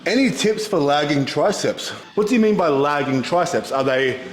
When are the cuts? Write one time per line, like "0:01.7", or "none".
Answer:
0:01.9